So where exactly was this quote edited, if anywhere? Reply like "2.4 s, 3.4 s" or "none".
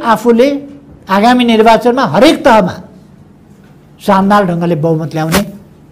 none

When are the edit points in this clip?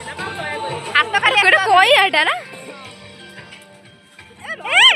none

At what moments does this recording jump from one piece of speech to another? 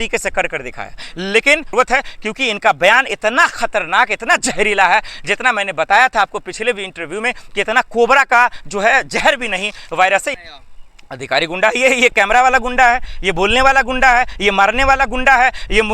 1.7 s, 10.4 s

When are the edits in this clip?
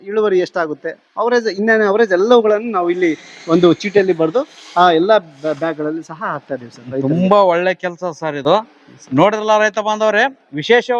none

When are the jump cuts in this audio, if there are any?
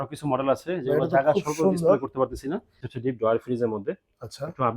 2.9 s

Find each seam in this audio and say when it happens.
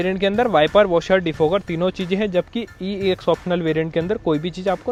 none

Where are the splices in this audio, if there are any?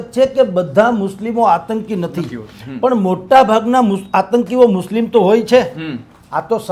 none

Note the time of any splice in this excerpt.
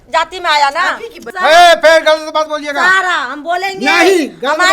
1.2 s

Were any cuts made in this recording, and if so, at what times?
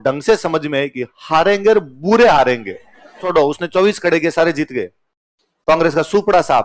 3.2 s

